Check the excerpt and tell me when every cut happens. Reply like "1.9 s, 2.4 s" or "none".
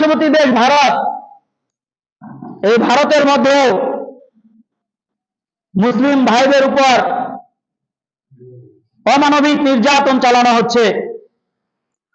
none